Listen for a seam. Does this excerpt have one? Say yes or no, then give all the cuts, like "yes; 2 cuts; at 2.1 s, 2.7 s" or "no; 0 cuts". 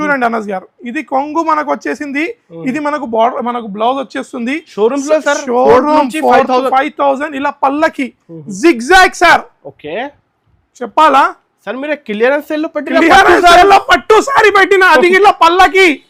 no; 0 cuts